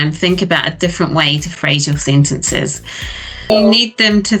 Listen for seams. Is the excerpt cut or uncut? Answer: cut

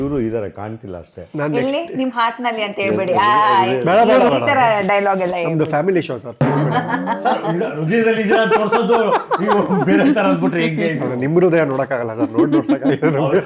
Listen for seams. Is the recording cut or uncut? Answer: uncut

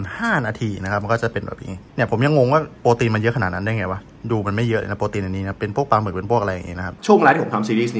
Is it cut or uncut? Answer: cut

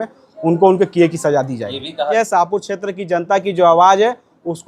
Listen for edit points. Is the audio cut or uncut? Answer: cut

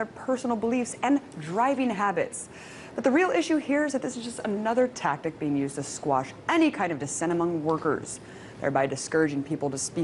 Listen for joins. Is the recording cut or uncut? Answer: cut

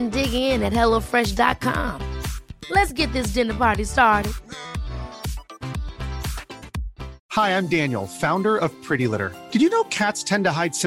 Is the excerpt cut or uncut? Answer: uncut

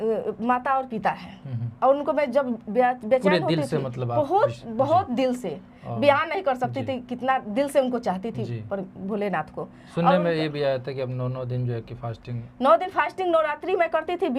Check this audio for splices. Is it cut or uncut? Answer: uncut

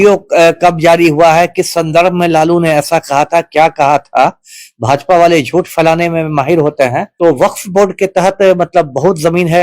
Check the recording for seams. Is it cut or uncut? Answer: cut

